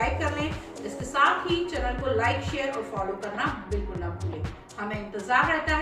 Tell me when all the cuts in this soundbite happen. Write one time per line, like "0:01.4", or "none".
none